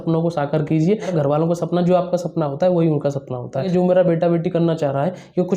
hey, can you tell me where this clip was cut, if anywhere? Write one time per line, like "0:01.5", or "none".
0:01.1
0:03.7